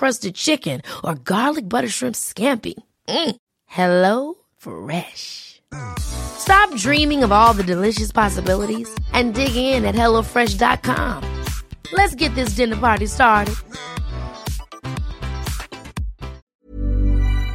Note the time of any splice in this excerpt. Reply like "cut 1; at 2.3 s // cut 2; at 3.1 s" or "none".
cut 1; at 16.4 s

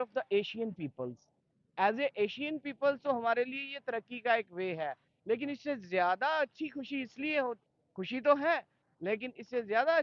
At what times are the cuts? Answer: none

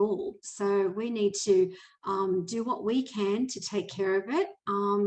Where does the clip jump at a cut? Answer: none

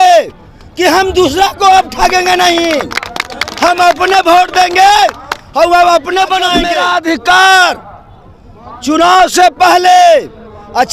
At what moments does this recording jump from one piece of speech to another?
cut 1; at 6.6 s

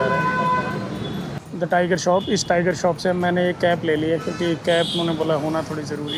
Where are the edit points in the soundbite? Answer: cut 1; at 1.3 s

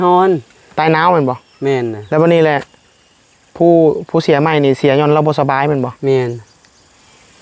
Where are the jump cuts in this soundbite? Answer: cut 1; at 2.0 s

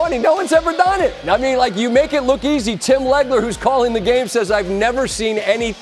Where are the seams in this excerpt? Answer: none

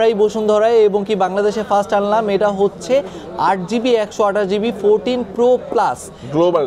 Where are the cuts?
none

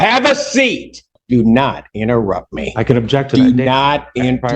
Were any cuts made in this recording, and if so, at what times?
cut 1; at 1.1 s

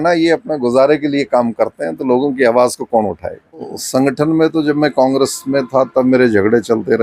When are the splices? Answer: cut 1; at 3.7 s

